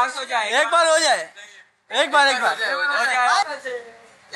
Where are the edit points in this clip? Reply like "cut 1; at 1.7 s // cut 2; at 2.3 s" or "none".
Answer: cut 1; at 3.4 s